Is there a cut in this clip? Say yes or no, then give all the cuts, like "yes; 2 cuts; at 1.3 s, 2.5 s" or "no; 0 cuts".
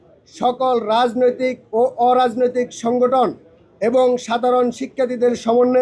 no; 0 cuts